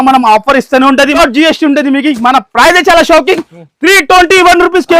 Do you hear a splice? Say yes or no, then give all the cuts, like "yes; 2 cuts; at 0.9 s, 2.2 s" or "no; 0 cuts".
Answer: yes; 1 cut; at 1.1 s